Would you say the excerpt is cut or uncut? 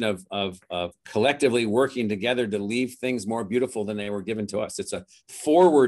cut